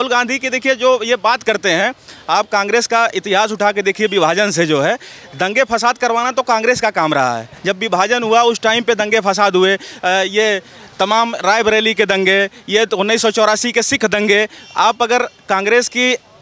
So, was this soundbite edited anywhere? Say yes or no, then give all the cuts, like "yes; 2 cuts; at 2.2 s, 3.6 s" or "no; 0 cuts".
no; 0 cuts